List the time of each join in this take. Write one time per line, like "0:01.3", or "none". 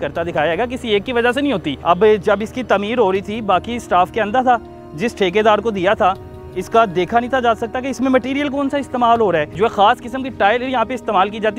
0:01.7
0:09.5